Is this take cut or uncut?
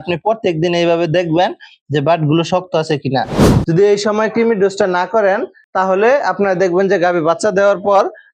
cut